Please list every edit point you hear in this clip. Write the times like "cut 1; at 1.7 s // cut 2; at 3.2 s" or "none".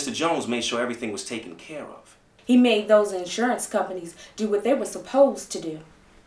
cut 1; at 2.2 s

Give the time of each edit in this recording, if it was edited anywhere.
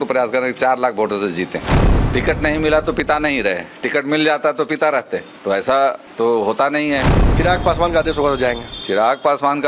cut 1; at 1.7 s // cut 2; at 5.3 s // cut 3; at 6.1 s // cut 4; at 7.1 s

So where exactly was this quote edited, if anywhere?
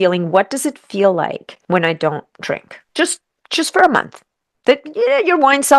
cut 1; at 1.5 s // cut 2; at 2.8 s

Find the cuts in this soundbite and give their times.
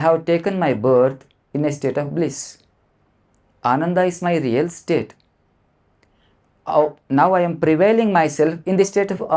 none

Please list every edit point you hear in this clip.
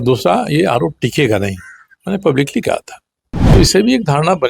cut 1; at 3.5 s

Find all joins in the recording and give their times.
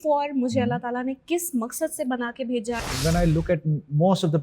cut 1; at 2.8 s

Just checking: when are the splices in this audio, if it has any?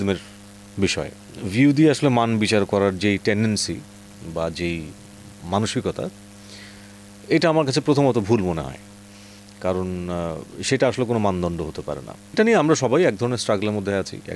none

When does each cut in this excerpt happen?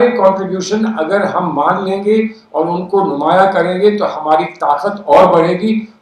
none

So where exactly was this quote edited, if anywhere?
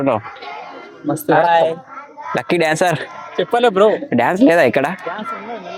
none

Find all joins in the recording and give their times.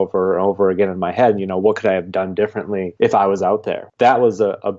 cut 1; at 2.9 s // cut 2; at 3.9 s

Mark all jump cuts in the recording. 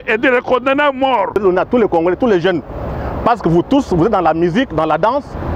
cut 1; at 1.4 s

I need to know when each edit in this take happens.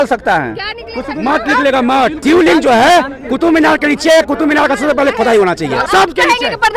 cut 1; at 2.2 s // cut 2; at 5.8 s

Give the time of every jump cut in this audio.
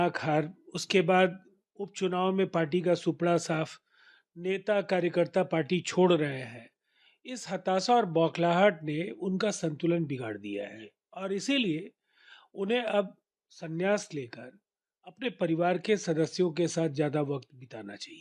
none

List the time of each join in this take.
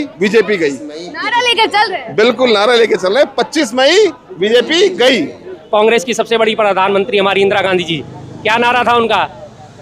cut 1; at 5.5 s

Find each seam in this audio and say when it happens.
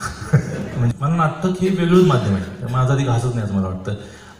cut 1; at 0.9 s

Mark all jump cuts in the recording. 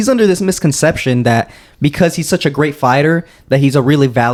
none

